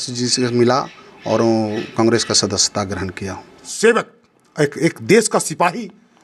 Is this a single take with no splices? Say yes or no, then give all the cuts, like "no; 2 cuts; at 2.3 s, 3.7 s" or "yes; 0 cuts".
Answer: no; 1 cut; at 3.7 s